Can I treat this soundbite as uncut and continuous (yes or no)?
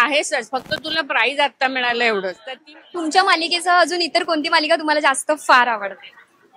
no